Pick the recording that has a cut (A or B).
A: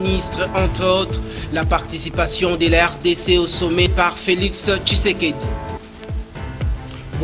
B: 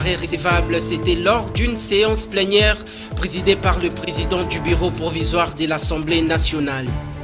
A